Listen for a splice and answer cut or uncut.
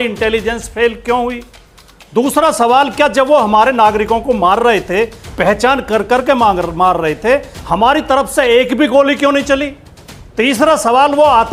uncut